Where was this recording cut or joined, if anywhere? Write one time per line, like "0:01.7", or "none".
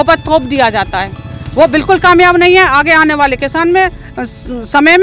none